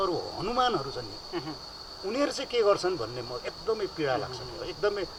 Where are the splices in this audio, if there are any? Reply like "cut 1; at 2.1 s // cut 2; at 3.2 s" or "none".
none